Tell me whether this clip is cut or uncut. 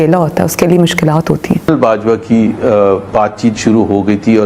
cut